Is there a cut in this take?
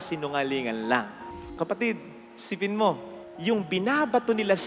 yes; 1 cut; at 1.5 s

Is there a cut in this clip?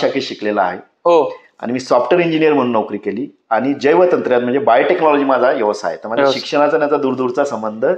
no; 0 cuts

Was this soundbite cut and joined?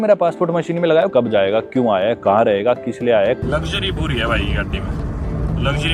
yes; 2 cuts; at 1.1 s, 3.4 s

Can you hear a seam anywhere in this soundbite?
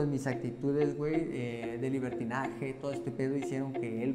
no; 0 cuts

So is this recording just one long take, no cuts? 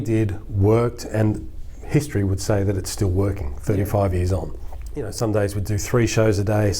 no; 1 cut; at 5.1 s

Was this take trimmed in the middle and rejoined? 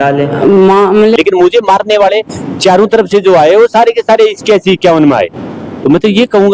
yes; 1 cut; at 1.2 s

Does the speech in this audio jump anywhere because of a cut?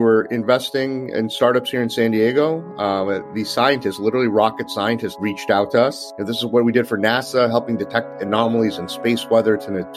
yes; 1 cut; at 5.1 s

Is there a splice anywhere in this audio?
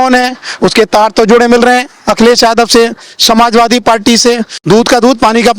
yes; 1 cut; at 4.6 s

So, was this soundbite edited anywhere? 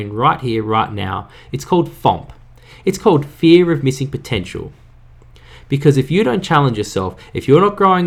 no; 0 cuts

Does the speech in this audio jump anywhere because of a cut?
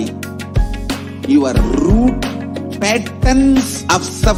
no; 0 cuts

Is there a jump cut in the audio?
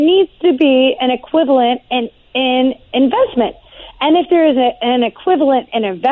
no; 0 cuts

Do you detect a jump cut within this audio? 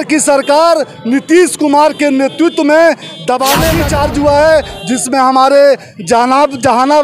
yes; 1 cut; at 3.8 s

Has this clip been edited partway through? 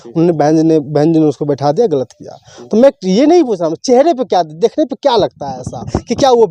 no; 0 cuts

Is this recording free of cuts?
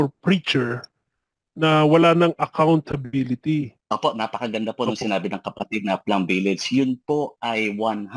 no; 1 cut; at 3.8 s

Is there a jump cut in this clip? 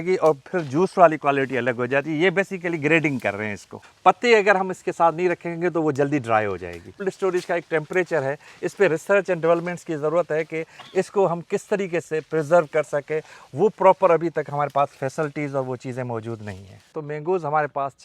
yes; 3 cuts; at 3.8 s, 7.0 s, 16.9 s

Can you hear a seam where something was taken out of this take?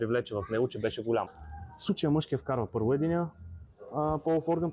yes; 1 cut; at 1.3 s

